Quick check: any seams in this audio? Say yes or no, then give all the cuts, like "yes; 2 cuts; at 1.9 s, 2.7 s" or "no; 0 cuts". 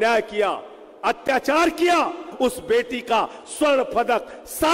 yes; 1 cut; at 2.3 s